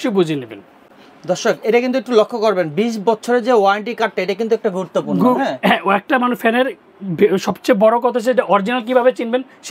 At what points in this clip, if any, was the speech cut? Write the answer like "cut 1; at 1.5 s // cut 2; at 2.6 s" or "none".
none